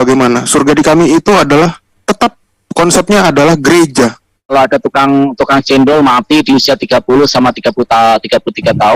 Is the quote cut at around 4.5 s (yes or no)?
yes